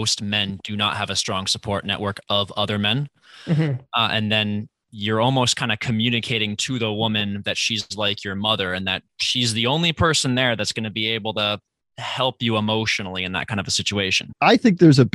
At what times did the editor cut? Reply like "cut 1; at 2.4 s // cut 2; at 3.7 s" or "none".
cut 1; at 14.2 s